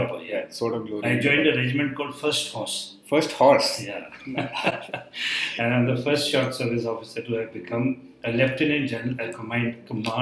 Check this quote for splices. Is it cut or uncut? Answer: uncut